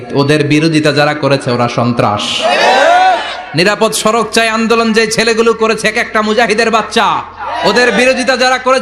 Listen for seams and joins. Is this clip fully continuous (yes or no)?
yes